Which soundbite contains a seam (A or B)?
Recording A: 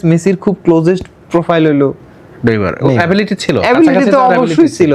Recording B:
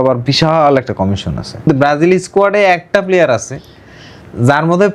B